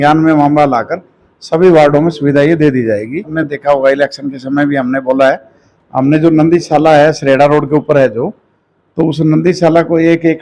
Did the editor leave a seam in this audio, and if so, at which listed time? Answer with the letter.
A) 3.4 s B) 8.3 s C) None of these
A